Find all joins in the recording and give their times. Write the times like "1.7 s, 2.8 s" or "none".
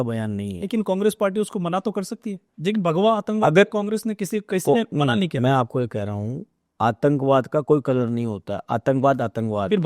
2.5 s